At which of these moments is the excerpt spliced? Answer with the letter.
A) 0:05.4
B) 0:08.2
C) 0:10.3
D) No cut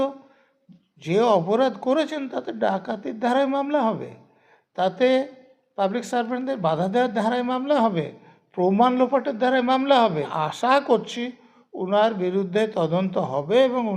C